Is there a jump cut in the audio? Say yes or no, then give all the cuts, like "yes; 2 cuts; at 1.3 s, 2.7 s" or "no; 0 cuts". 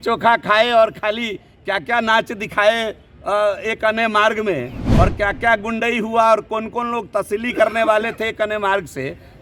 no; 0 cuts